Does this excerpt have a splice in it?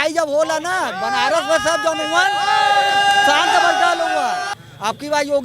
yes; 1 cut; at 4.5 s

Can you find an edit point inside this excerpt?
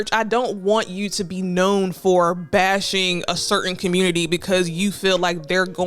no; 0 cuts

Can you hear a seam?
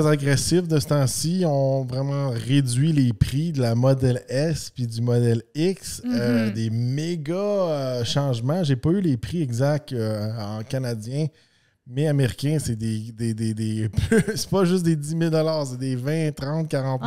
no; 0 cuts

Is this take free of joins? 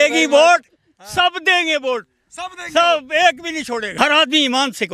no; 1 cut; at 3.9 s

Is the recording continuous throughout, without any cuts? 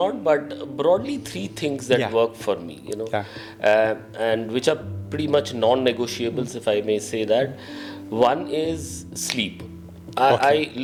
yes; 0 cuts

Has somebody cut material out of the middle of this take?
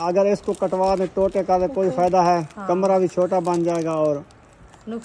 no; 0 cuts

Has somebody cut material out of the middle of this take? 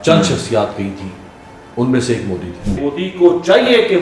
yes; 1 cut; at 2.8 s

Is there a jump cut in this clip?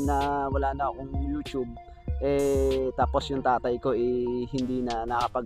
no; 0 cuts

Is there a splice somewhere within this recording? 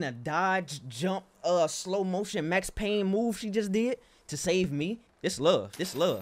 yes; 1 cut; at 5.1 s

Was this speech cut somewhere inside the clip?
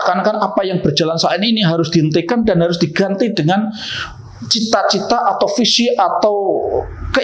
no; 0 cuts

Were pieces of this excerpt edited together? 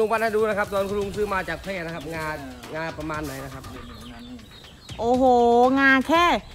yes; 1 cut; at 3.8 s

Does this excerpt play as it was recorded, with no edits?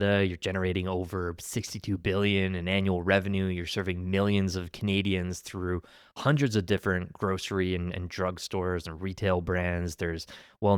yes; 0 cuts

